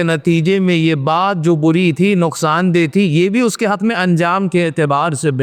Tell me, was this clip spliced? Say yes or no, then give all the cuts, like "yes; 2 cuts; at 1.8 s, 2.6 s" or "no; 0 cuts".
no; 0 cuts